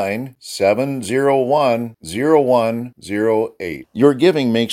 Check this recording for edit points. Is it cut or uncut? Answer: uncut